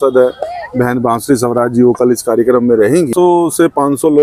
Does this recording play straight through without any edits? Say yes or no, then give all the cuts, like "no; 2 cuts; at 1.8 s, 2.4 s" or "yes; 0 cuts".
no; 1 cut; at 3.1 s